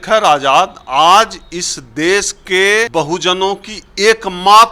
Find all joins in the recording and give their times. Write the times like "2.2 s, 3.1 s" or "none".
2.9 s